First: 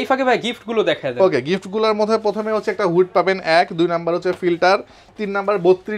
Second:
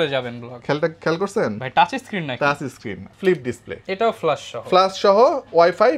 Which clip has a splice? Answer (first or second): second